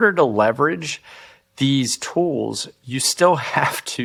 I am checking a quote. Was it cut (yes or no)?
no